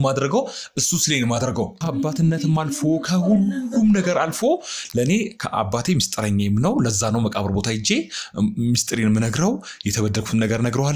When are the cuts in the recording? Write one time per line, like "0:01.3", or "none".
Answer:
0:01.8